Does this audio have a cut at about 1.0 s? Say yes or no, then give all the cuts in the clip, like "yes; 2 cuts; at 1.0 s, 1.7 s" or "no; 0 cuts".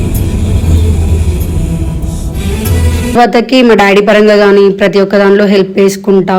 no; 1 cut; at 3.1 s